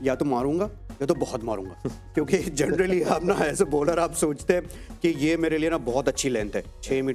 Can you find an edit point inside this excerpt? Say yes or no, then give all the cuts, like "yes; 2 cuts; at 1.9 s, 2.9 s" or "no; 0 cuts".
no; 0 cuts